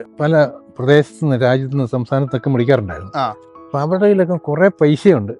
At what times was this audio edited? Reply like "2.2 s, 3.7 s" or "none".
none

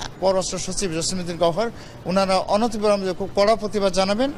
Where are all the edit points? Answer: none

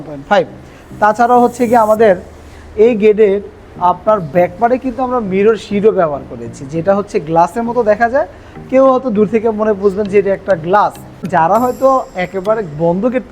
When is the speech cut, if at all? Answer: 11.3 s

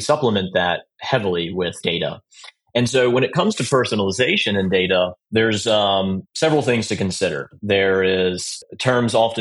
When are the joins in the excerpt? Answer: 1.8 s, 5.2 s, 6.3 s, 7.5 s, 8.5 s

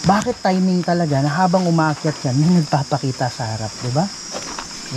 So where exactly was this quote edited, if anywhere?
none

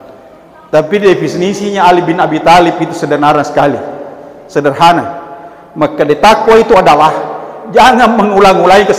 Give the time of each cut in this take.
none

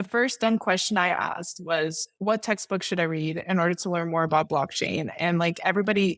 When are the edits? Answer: 2.1 s

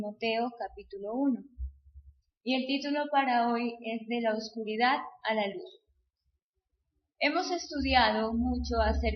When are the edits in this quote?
none

